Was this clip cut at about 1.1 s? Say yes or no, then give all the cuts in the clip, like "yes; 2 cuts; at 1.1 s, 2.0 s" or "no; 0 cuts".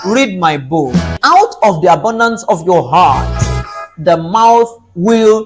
yes; 1 cut; at 1.1 s